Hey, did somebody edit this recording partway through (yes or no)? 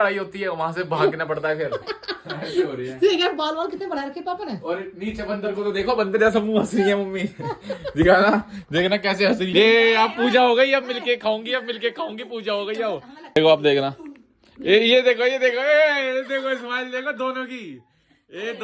yes